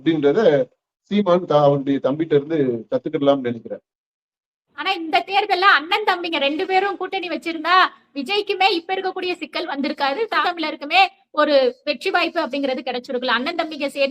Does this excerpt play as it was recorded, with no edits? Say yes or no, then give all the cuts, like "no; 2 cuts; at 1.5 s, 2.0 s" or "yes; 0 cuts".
no; 2 cuts; at 4.7 s, 10.4 s